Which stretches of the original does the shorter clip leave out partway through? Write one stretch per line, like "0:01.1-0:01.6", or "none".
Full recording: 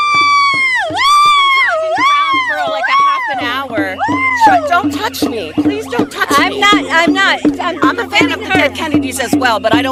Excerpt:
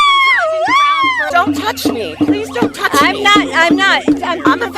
0:02.6-0:04.7